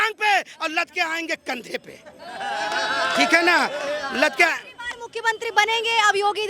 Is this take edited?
no; 0 cuts

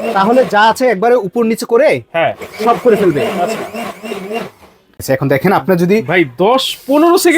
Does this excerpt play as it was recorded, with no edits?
no; 1 cut; at 4.9 s

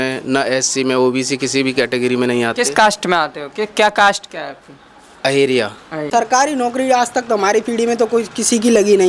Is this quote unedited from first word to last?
no; 1 cut; at 6.0 s

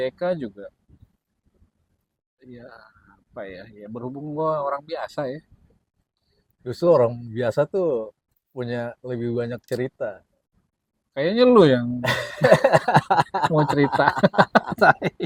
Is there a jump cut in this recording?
no; 0 cuts

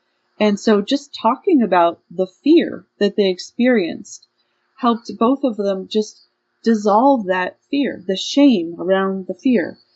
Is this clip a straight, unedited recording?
yes; 0 cuts

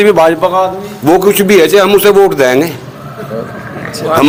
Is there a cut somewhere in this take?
no; 0 cuts

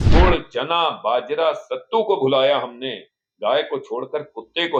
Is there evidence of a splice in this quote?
no; 0 cuts

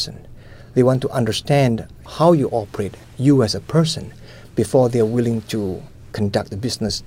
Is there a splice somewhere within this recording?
yes; 2 cuts; at 2.0 s, 6.1 s

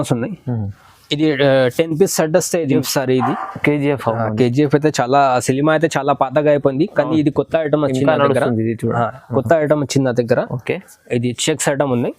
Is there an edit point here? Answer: yes; 1 cut; at 2.7 s

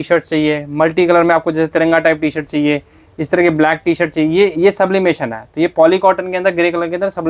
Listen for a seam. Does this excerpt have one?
no; 0 cuts

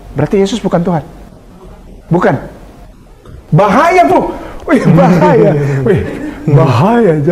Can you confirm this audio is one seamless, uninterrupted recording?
yes; 0 cuts

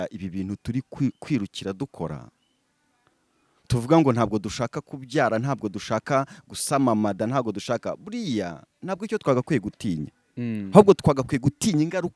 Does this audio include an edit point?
no; 0 cuts

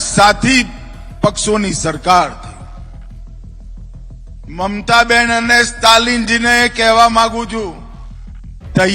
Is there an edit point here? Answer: yes; 2 cuts; at 2.7 s, 4.5 s

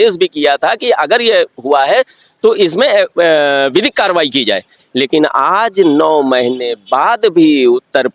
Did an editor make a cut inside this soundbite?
no; 0 cuts

